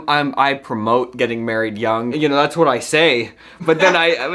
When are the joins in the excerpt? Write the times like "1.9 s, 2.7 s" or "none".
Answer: 2.1 s